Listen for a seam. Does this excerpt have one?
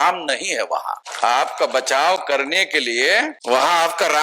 yes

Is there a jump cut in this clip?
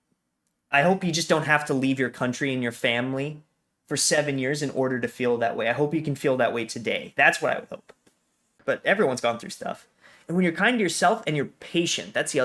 yes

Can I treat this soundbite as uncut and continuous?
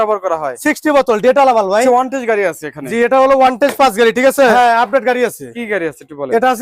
no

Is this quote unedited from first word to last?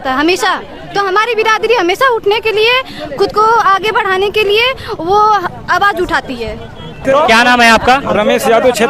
yes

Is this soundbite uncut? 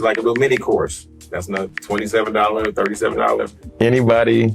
no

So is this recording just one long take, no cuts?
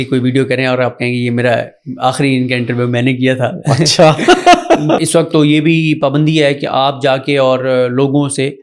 no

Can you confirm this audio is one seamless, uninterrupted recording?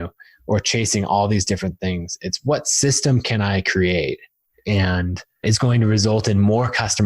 no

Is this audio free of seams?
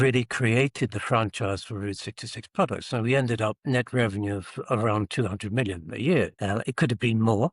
no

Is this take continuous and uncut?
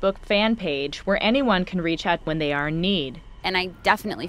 no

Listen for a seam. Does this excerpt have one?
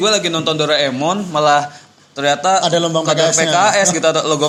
no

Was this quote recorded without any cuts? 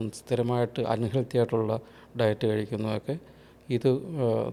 yes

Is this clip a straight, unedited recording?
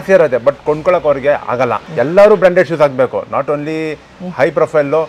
no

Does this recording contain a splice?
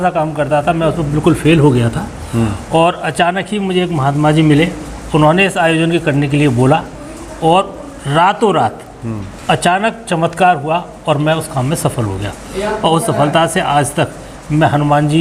no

